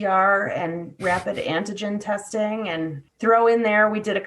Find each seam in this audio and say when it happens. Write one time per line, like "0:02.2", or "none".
0:03.0